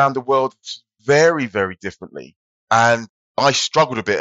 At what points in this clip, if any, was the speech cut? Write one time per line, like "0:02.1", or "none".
0:03.0